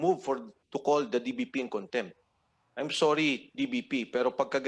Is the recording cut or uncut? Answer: uncut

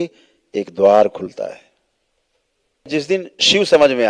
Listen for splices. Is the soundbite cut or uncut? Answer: cut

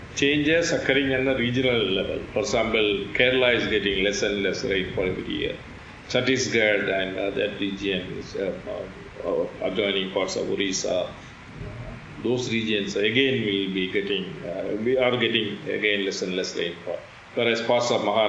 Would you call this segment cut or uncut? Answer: uncut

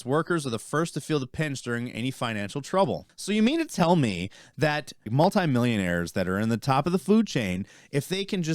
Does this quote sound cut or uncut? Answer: cut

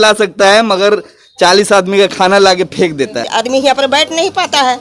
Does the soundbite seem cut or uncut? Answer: cut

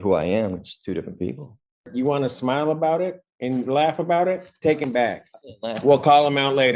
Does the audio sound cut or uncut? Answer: cut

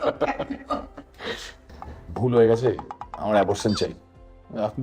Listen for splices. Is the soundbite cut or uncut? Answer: cut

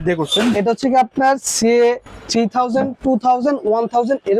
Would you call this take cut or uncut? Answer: uncut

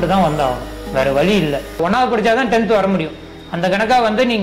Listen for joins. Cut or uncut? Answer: cut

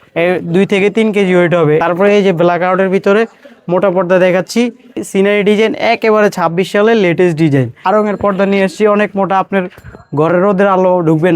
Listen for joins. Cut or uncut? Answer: cut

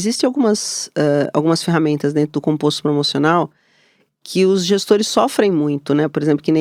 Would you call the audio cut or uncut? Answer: uncut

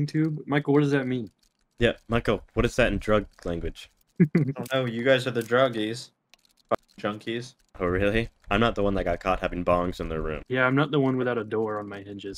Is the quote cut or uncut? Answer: uncut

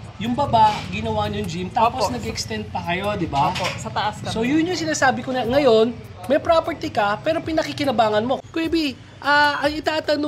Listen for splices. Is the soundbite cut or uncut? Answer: cut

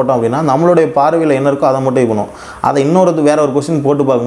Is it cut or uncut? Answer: uncut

